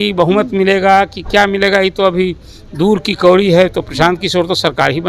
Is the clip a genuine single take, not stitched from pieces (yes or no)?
yes